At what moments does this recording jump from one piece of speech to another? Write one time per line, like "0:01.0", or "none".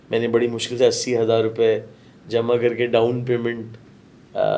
none